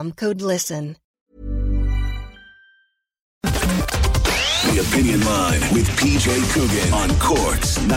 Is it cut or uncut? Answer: cut